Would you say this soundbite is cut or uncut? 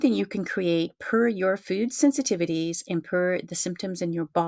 uncut